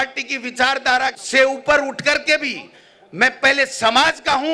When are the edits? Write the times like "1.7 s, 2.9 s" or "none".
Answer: 1.2 s